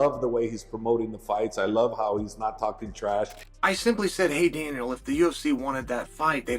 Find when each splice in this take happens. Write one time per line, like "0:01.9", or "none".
0:03.4